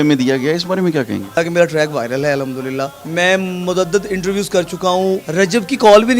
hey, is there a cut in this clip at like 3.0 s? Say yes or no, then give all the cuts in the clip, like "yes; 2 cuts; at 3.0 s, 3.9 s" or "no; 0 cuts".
yes; 3 cuts; at 1.4 s, 3.0 s, 5.3 s